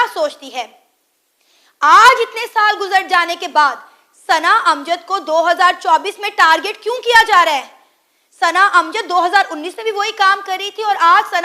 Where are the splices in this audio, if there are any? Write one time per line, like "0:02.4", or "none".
none